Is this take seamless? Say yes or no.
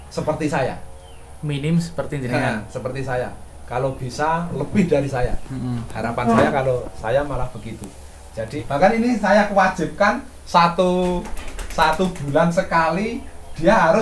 no